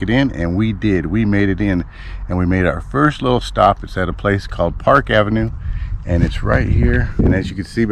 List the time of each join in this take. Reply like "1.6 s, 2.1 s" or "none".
none